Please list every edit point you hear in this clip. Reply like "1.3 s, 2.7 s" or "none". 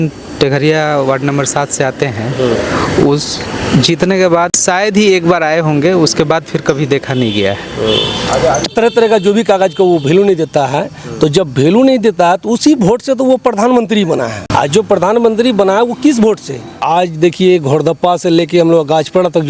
4.6 s, 8.7 s, 14.4 s, 16.8 s